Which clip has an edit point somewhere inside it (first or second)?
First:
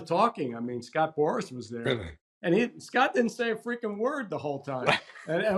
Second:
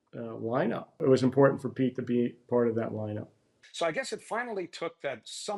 second